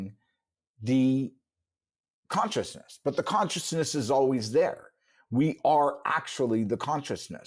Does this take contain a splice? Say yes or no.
no